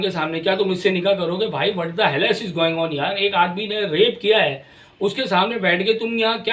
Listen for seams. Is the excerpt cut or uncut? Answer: uncut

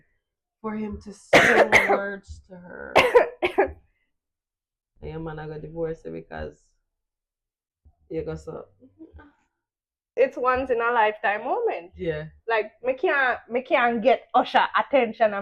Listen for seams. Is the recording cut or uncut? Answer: cut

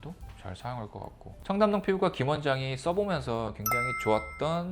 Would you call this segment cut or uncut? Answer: cut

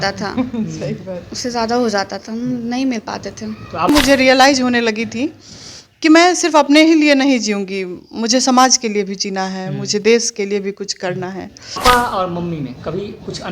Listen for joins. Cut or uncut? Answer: cut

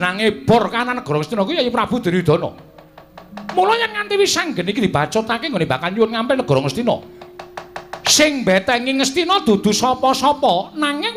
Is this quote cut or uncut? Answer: cut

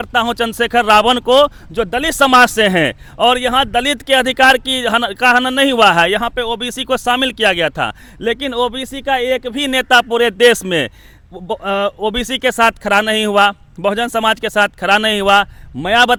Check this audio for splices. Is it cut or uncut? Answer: uncut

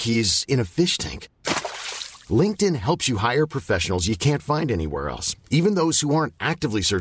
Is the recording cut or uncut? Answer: uncut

